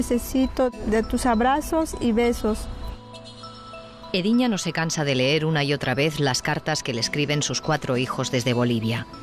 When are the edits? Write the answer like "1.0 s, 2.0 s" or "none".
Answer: 6.9 s